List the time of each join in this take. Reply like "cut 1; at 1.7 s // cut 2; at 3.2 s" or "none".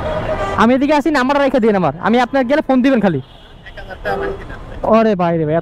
none